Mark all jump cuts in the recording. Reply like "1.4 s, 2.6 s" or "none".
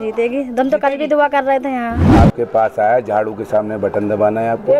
2.0 s

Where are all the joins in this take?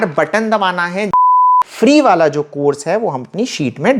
1.3 s

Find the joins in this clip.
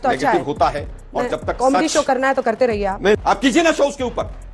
3.2 s

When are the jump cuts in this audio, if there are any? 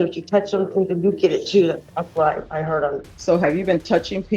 3.1 s

